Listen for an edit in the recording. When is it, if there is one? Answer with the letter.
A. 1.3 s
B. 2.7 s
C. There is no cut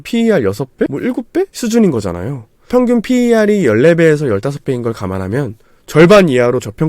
B